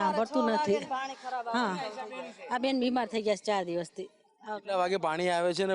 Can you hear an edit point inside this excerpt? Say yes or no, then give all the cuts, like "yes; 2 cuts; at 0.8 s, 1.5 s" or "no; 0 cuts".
no; 0 cuts